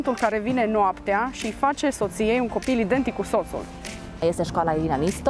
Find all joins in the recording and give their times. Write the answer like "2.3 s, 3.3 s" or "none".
4.2 s